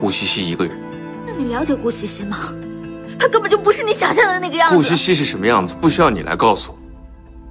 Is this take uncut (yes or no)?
no